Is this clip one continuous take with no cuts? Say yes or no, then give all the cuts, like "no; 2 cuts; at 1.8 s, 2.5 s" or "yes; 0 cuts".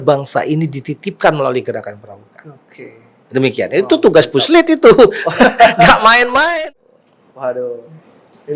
no; 1 cut; at 6.5 s